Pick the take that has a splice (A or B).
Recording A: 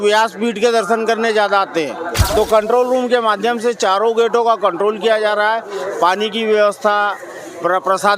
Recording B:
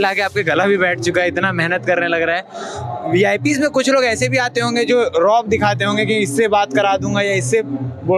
A